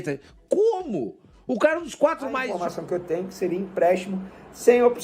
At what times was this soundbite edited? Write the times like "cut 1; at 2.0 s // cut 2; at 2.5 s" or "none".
cut 1; at 2.5 s